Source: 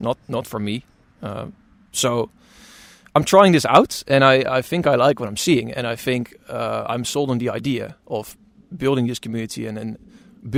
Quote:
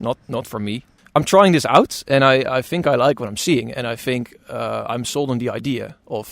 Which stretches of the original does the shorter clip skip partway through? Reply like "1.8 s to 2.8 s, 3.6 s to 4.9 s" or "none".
0.9 s to 2.9 s